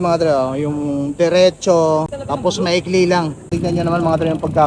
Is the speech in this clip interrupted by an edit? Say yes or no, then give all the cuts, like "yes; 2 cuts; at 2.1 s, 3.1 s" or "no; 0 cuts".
yes; 2 cuts; at 2.2 s, 3.4 s